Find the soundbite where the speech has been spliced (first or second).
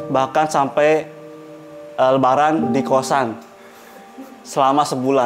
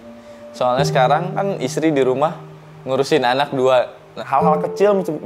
second